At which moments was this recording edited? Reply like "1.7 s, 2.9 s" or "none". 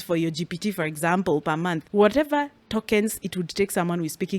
1.8 s